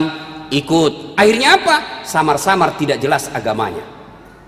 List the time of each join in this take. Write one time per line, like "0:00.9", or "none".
none